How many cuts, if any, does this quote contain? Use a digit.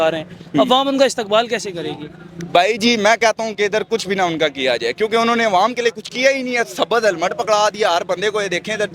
0